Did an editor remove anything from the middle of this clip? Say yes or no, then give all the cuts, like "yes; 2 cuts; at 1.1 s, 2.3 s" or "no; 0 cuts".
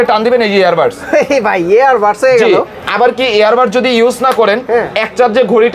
yes; 1 cut; at 2.8 s